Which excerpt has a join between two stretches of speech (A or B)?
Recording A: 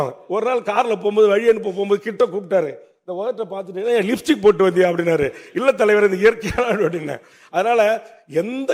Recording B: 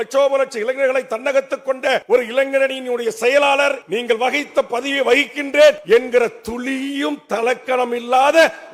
B